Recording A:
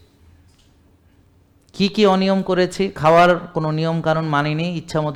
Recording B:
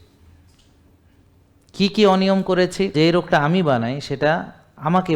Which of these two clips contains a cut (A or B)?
B